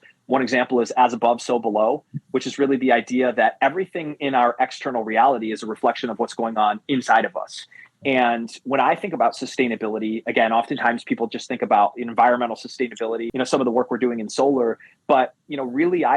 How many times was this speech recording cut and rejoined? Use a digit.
1